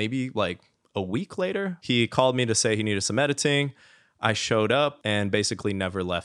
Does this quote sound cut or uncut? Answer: cut